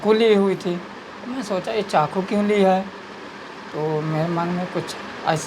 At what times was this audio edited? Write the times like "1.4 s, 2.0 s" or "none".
none